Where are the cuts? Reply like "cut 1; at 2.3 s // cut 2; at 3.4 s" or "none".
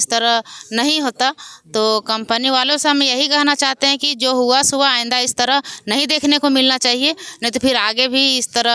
none

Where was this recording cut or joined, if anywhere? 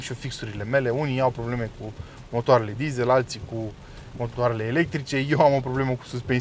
none

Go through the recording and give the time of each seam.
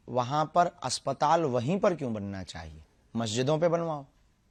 none

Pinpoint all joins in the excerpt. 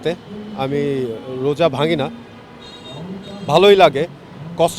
none

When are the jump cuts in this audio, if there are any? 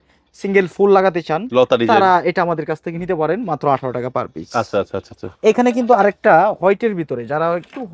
none

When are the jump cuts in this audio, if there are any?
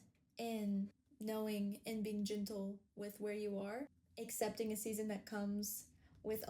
cut 1; at 1.1 s // cut 2; at 4.0 s

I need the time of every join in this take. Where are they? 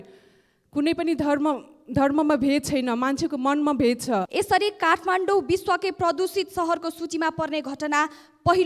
cut 1; at 4.3 s

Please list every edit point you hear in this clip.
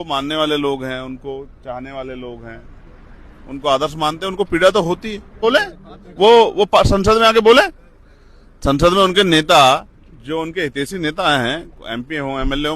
cut 1; at 5.4 s

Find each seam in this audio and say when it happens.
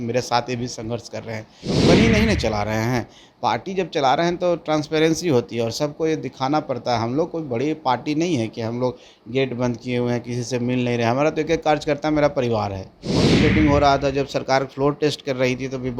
cut 1; at 1.8 s // cut 2; at 13.3 s

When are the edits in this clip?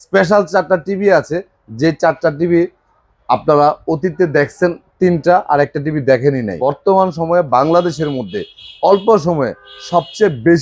cut 1; at 6.5 s

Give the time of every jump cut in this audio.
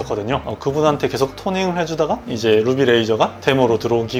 none

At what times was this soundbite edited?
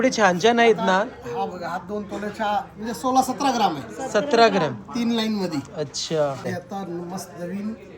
cut 1; at 6.5 s

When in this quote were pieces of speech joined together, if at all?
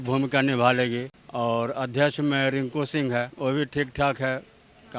cut 1; at 1.2 s // cut 2; at 3.3 s

